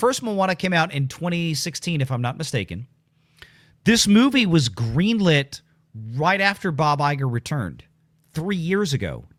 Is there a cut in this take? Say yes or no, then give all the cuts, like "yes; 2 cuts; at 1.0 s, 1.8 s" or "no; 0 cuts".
no; 0 cuts